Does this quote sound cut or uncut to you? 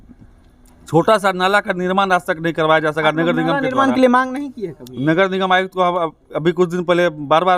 uncut